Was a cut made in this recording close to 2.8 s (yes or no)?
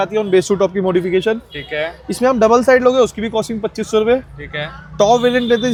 no